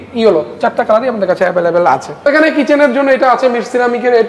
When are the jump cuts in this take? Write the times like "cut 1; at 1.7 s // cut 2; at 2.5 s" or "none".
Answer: cut 1; at 2.3 s